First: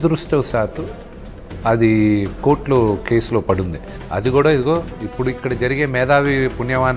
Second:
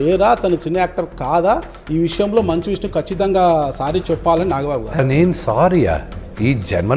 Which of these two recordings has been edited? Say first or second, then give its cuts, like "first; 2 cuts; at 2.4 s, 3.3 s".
second; 1 cut; at 5.0 s